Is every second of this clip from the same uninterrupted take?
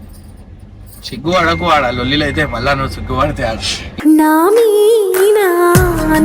yes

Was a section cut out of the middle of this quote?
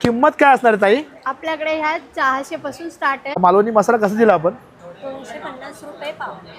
yes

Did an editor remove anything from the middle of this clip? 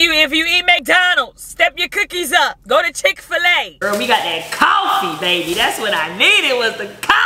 yes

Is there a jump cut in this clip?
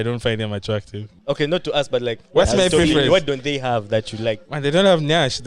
yes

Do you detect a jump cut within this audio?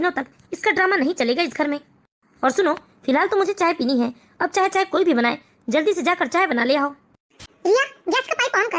yes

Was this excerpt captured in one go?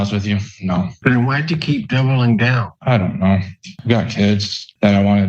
no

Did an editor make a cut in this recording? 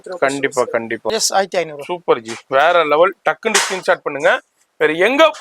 yes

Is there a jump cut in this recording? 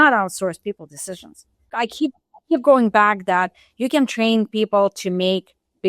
yes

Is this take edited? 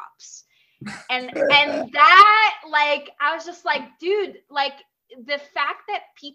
no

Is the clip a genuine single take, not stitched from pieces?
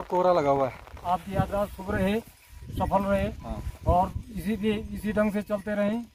no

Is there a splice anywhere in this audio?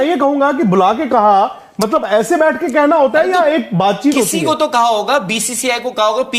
no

